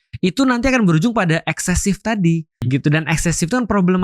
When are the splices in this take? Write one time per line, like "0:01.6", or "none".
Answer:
0:02.6